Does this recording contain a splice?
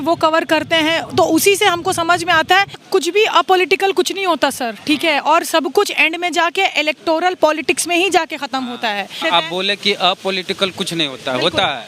yes; 2 cuts; at 2.8 s, 9.2 s

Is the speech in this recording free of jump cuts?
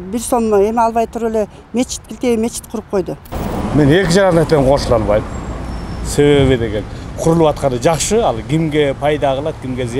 no; 1 cut; at 3.3 s

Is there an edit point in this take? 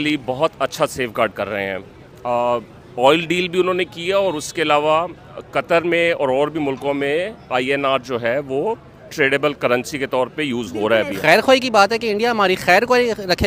yes; 1 cut; at 11.1 s

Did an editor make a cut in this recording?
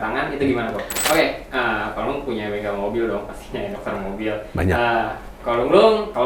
yes; 1 cut; at 0.9 s

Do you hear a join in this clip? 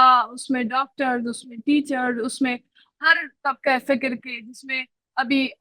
no; 0 cuts

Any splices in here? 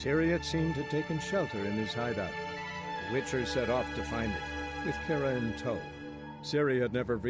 no; 0 cuts

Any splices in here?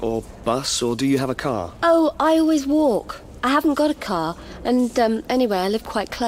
no; 0 cuts

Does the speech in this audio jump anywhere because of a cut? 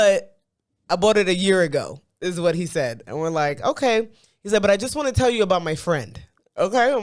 no; 0 cuts

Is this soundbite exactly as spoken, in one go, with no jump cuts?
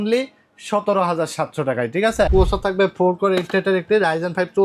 no; 1 cut; at 2.3 s

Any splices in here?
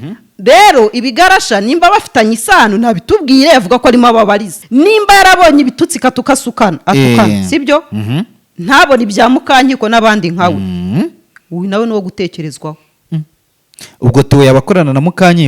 yes; 1 cut; at 4.6 s

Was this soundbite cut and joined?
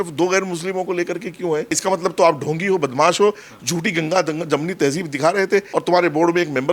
yes; 2 cuts; at 1.8 s, 5.7 s

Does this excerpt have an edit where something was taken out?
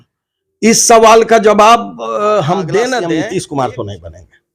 yes; 1 cut; at 3.0 s

